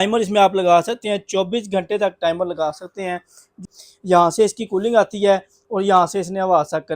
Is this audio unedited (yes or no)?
no